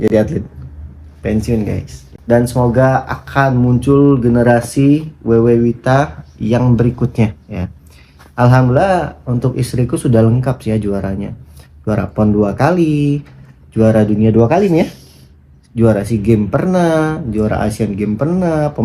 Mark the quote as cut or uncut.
cut